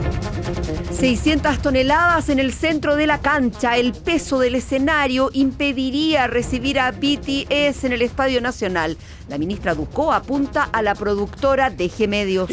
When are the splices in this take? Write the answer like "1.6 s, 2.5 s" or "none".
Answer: 1.0 s